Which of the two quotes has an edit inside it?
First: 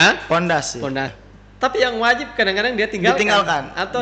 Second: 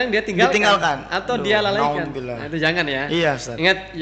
first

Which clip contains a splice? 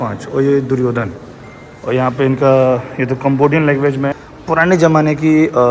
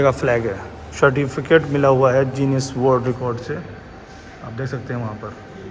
first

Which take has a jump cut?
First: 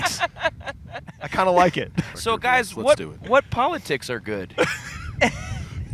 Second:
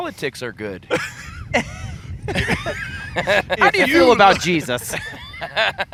first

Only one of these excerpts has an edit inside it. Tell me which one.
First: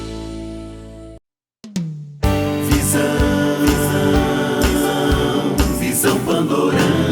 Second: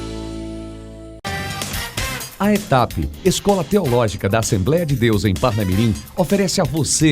second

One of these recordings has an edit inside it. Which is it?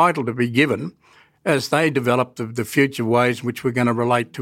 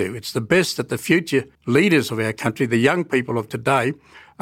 second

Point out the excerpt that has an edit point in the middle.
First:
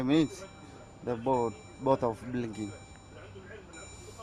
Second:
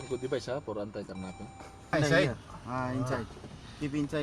second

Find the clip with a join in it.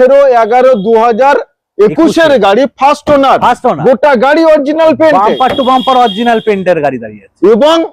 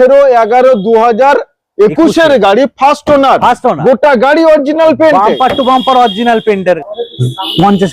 second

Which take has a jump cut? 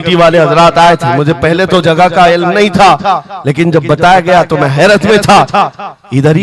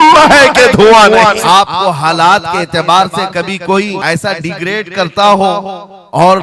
second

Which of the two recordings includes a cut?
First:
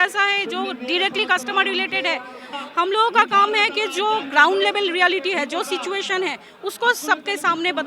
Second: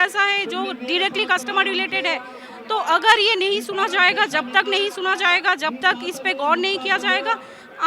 first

